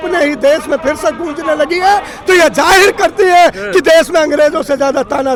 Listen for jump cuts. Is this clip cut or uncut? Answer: uncut